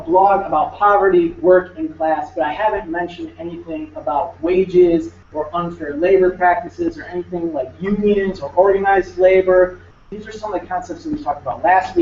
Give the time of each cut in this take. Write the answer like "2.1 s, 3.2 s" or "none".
7.9 s